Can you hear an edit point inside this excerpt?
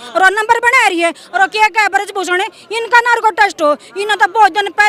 no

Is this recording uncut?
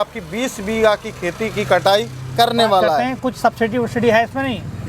no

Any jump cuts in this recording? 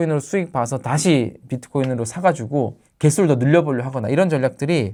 no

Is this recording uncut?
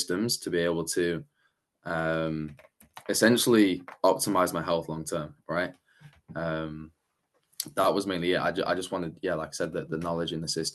yes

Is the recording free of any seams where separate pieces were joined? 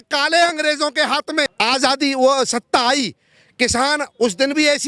no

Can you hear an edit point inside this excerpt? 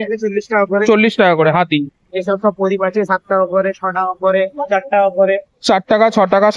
no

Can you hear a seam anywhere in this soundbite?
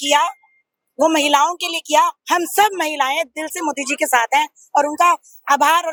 no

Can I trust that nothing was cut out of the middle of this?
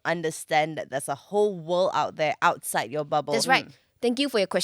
no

